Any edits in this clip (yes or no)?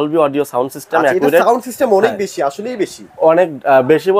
no